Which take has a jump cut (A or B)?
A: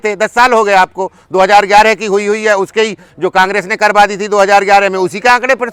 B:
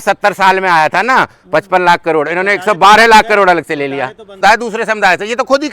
B